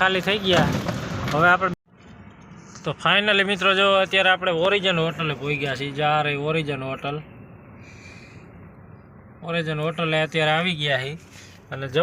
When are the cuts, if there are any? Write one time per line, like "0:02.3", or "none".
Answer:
0:01.7